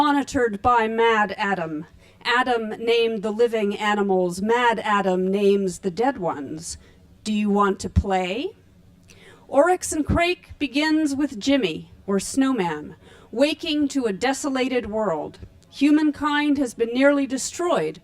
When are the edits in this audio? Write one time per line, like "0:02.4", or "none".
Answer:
0:13.9

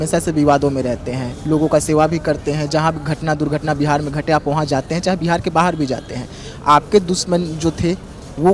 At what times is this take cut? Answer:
none

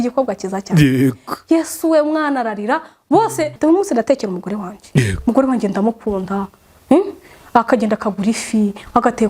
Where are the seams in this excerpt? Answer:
0:03.5

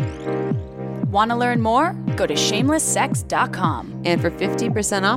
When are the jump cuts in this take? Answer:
0:01.1

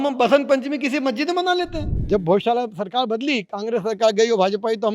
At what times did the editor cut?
0:01.9

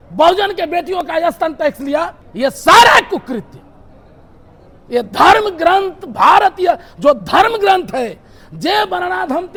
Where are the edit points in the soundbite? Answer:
none

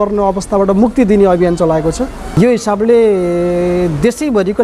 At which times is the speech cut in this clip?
0:02.4

